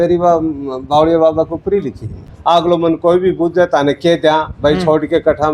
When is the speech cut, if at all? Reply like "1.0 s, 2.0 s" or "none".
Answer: 2.2 s